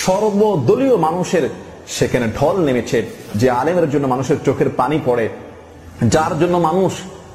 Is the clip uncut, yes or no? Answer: no